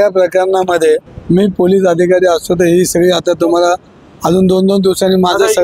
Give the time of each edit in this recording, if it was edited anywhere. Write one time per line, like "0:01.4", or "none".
0:01.1